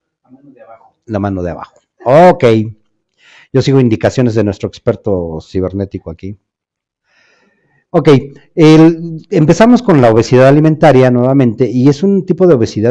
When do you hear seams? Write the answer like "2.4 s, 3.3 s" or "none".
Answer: none